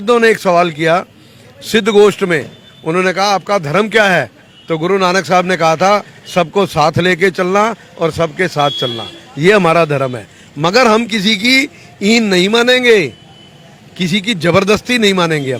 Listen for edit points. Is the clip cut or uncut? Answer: uncut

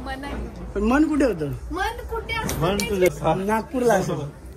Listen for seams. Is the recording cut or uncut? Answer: cut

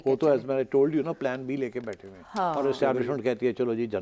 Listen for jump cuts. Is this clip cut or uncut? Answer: cut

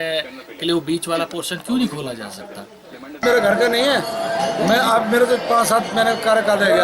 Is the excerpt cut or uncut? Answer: cut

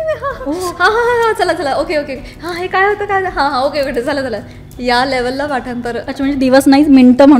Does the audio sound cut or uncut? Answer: uncut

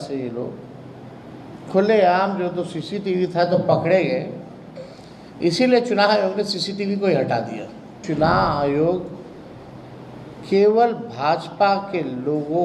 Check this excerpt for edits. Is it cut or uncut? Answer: cut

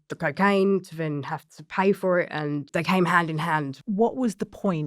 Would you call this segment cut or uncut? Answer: cut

